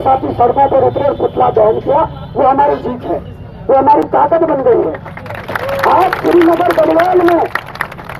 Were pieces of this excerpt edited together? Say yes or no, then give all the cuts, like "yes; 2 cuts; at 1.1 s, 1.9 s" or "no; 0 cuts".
no; 0 cuts